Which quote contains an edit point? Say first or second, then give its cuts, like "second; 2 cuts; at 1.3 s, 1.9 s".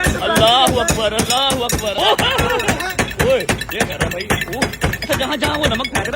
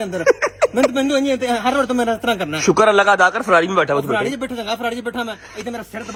first; 1 cut; at 2.0 s